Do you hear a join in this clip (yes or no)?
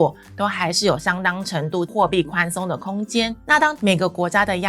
yes